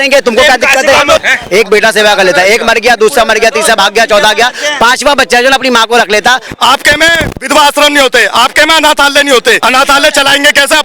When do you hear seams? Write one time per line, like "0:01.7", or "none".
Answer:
0:01.2
0:06.4
0:09.6